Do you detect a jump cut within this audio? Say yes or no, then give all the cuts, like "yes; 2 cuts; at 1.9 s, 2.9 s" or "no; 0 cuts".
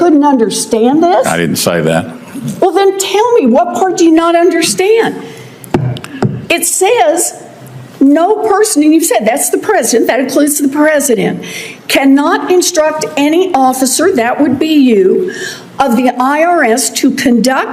no; 0 cuts